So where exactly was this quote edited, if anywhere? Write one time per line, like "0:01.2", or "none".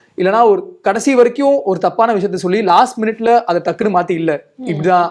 none